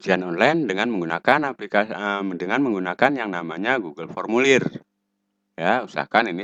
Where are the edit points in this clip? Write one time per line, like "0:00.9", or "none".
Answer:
none